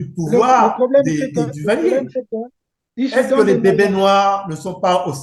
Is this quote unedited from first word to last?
yes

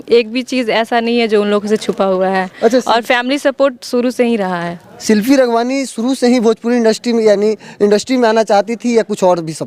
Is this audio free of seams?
yes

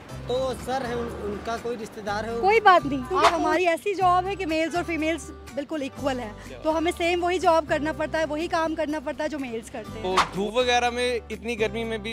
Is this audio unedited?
no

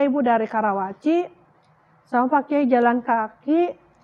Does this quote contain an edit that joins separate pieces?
no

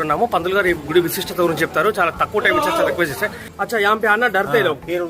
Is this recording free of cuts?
no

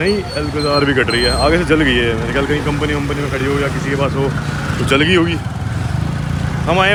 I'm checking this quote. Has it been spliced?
no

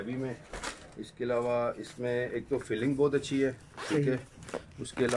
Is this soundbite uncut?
yes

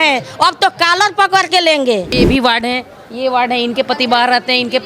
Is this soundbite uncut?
no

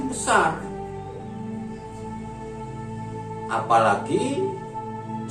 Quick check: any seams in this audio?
yes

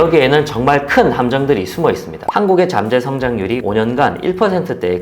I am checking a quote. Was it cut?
yes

